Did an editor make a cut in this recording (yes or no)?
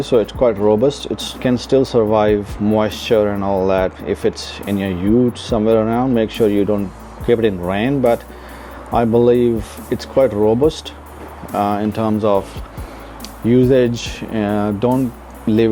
no